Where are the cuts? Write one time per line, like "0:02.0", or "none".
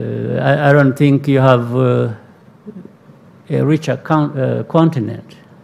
none